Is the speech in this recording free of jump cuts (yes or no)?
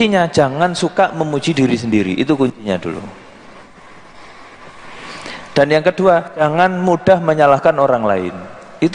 yes